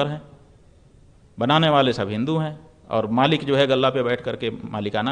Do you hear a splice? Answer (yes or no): no